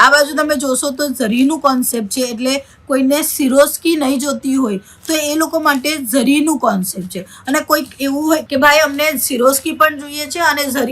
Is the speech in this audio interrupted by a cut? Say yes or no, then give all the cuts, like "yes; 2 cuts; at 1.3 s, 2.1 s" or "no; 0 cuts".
no; 0 cuts